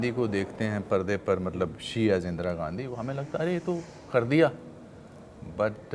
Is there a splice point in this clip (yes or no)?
no